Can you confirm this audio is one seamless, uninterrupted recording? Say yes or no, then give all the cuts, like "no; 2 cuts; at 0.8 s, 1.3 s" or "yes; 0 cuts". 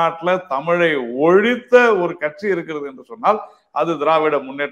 yes; 0 cuts